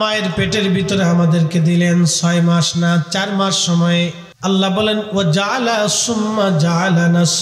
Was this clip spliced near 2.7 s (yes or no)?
no